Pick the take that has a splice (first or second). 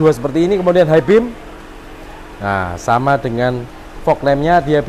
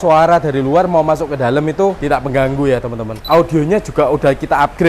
second